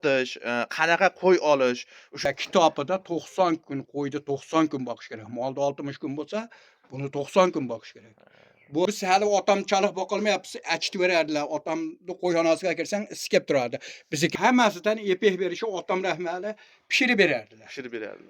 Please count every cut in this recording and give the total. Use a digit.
3